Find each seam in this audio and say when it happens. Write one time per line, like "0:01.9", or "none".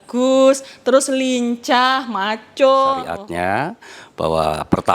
0:03.2